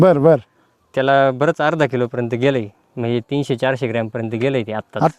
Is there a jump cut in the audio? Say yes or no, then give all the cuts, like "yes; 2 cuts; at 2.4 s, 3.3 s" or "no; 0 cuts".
no; 0 cuts